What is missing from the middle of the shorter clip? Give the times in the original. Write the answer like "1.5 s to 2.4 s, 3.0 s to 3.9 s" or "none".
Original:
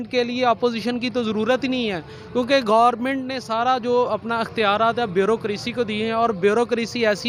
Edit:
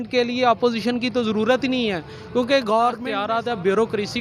3.1 s to 4.6 s